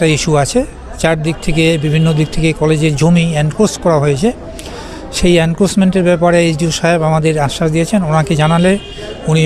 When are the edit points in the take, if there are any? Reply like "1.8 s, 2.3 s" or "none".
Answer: none

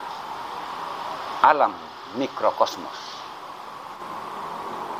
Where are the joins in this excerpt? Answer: 4.0 s

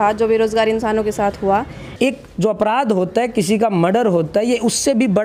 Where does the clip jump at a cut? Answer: 1.8 s

